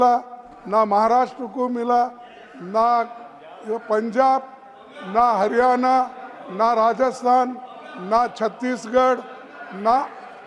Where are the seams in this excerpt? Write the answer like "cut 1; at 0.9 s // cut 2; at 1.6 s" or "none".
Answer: none